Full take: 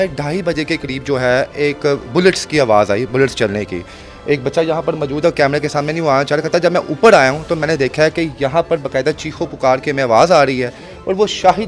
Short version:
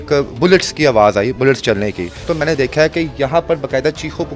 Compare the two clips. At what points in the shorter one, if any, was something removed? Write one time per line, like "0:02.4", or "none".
0:02.2